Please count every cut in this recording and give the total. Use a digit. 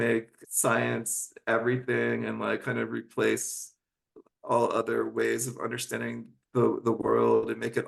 0